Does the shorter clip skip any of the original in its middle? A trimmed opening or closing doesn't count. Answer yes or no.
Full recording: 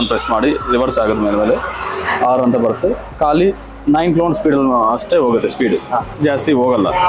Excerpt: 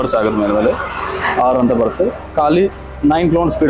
no